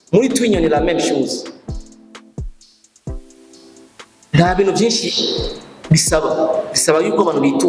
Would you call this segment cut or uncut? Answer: uncut